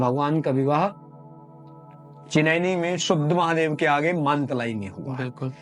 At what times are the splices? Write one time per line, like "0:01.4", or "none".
none